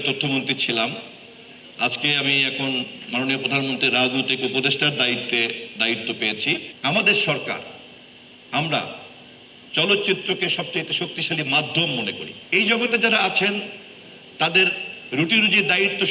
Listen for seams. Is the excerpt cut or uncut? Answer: cut